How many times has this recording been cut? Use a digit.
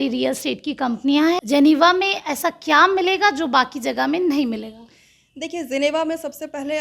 1